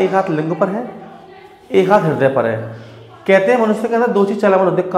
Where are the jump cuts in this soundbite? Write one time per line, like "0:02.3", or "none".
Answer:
none